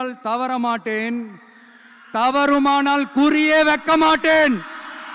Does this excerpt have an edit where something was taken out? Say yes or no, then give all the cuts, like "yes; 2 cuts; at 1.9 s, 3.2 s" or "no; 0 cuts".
no; 0 cuts